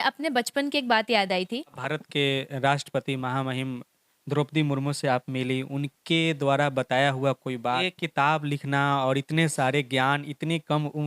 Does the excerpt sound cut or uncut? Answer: cut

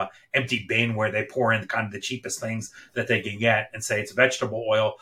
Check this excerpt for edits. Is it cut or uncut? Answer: uncut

